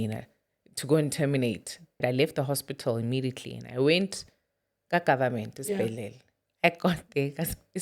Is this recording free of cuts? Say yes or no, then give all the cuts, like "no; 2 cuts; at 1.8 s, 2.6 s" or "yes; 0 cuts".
no; 1 cut; at 2.0 s